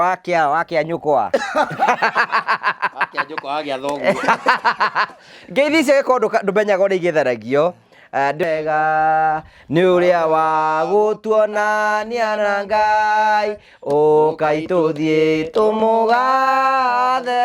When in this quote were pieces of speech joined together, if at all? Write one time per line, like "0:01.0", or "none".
0:08.4